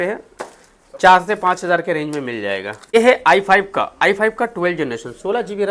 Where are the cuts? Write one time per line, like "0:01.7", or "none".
0:02.9